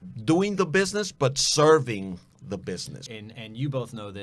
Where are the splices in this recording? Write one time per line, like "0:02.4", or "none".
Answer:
0:03.0

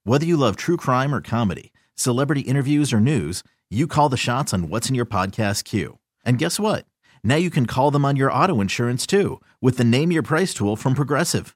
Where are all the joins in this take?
none

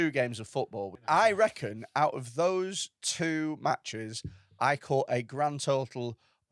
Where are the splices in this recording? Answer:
0:01.0

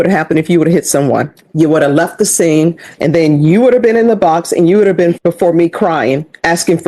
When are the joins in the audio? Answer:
0:01.4
0:02.9
0:05.2

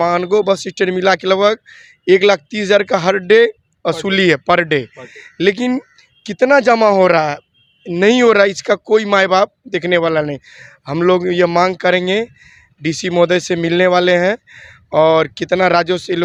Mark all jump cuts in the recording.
none

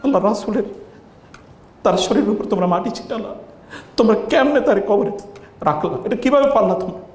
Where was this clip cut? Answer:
none

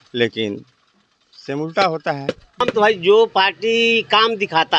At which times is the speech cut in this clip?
0:02.7

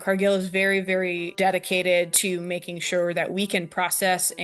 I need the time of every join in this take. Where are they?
0:01.3

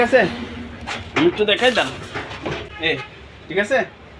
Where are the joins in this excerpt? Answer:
0:02.7

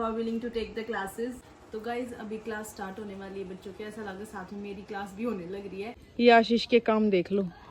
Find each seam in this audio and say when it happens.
0:01.5
0:06.0

